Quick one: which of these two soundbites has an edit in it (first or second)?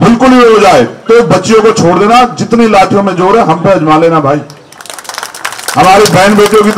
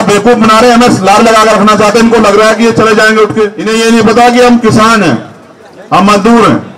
second